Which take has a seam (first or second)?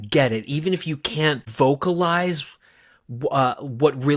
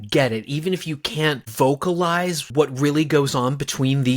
second